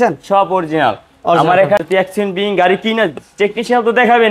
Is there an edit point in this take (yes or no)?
yes